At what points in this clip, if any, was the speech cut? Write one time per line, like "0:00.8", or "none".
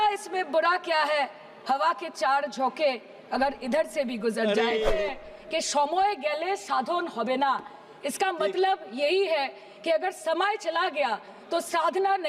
0:05.0